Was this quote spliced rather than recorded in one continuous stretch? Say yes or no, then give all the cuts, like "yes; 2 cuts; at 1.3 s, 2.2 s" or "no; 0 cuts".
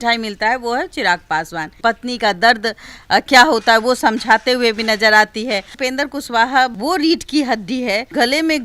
yes; 2 cuts; at 1.8 s, 5.7 s